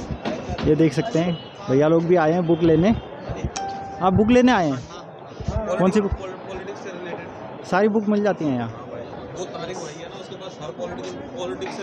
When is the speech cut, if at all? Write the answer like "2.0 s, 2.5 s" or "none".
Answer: none